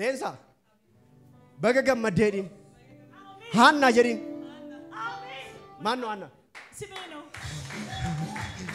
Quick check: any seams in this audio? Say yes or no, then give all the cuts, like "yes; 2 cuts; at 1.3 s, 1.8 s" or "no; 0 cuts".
no; 0 cuts